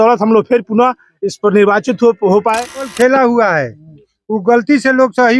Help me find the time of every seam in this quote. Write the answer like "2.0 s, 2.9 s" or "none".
2.9 s